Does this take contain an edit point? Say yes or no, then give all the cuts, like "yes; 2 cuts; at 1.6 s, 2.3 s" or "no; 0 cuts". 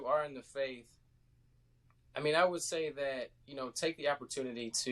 no; 0 cuts